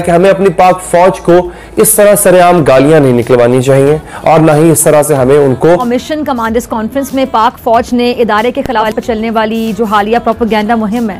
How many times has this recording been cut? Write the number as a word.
two